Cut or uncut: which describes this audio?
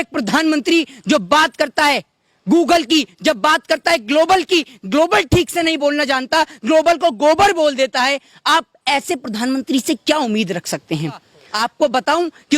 cut